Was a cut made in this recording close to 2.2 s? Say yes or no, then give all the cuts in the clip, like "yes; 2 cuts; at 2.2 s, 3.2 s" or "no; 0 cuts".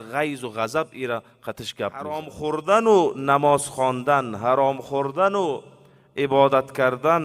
yes; 1 cut; at 2.2 s